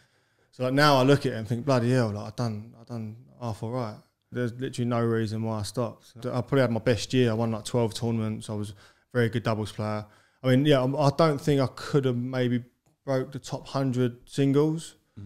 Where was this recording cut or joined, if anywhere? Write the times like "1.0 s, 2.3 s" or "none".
4.3 s, 6.2 s